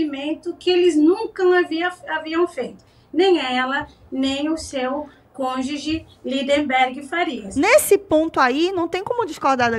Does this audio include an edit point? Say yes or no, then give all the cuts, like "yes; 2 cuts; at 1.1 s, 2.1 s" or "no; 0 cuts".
yes; 1 cut; at 7.4 s